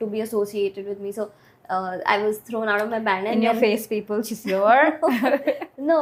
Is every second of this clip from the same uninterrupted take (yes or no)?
yes